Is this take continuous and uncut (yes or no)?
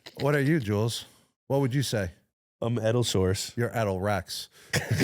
no